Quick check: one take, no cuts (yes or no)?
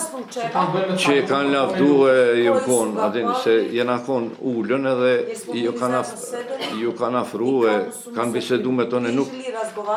yes